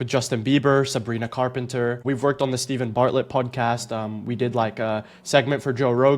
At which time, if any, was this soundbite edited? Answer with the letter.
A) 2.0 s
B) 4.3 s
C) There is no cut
A